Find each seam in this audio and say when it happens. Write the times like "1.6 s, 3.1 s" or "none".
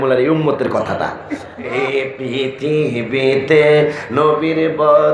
1.7 s